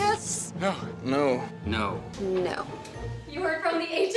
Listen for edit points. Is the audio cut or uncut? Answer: uncut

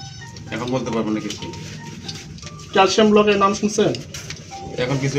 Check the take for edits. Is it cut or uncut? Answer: uncut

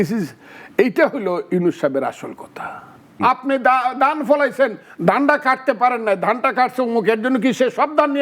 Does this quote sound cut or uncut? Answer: cut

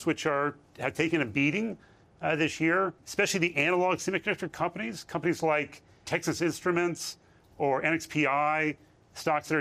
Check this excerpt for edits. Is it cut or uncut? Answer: cut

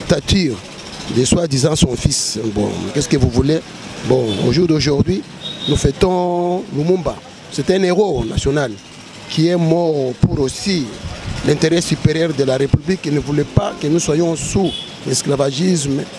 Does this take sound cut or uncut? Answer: uncut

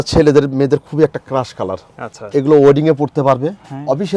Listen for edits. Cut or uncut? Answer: uncut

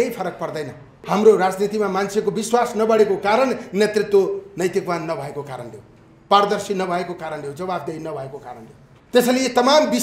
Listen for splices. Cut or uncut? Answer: cut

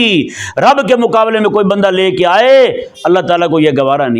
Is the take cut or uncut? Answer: uncut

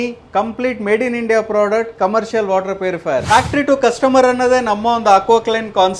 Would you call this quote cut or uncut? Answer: cut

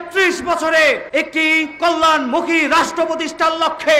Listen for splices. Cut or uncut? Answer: cut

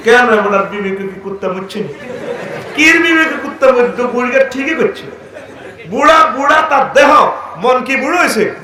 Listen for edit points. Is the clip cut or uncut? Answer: uncut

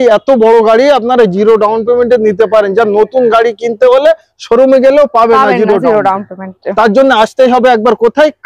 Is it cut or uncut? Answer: uncut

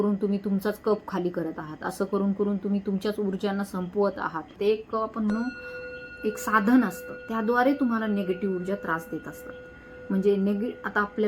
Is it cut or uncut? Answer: cut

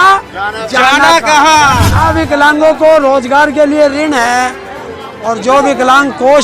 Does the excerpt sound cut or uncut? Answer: cut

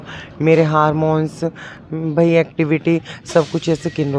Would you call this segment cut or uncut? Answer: uncut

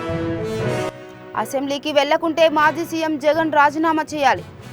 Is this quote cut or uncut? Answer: cut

